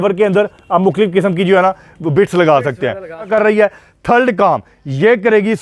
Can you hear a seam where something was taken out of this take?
yes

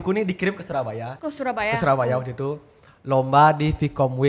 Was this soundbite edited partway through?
yes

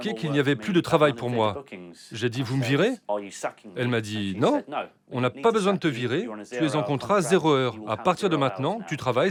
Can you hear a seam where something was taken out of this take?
no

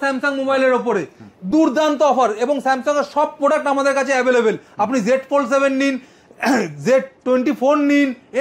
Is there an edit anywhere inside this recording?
no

